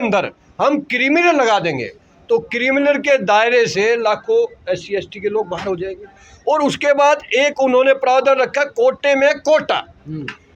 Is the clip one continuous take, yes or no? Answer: yes